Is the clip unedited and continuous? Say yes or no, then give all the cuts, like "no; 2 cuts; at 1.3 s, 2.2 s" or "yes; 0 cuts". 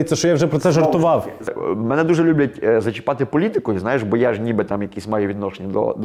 no; 1 cut; at 1.5 s